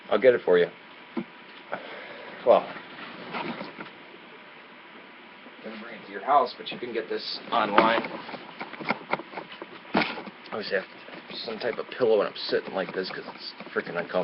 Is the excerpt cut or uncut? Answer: cut